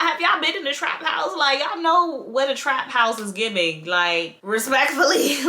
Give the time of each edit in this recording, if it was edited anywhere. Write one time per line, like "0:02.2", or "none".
none